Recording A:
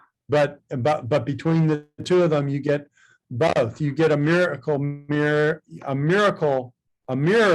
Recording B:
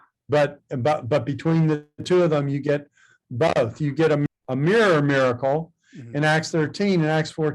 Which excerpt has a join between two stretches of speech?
B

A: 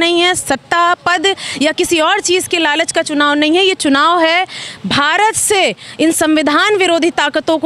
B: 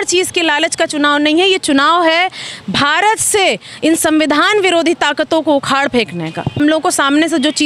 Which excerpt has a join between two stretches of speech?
B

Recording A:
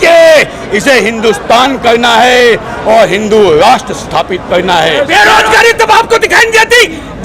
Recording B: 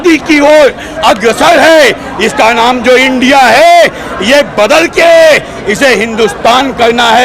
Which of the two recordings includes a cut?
A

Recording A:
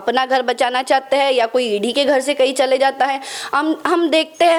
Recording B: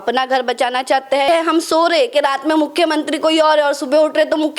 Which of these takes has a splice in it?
B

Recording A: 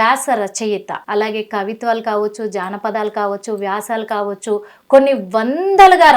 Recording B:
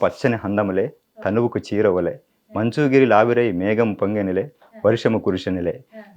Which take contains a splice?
A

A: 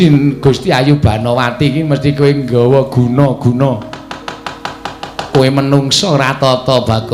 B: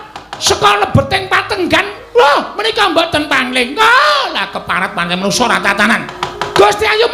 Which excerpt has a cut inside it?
B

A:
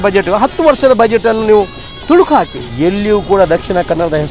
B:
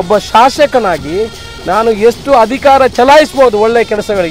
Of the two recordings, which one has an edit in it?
A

